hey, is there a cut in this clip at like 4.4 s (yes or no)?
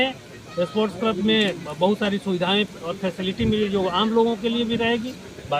no